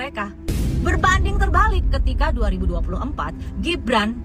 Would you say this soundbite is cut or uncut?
uncut